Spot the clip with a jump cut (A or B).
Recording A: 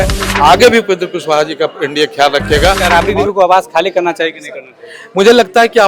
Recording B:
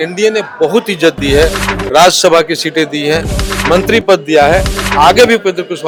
A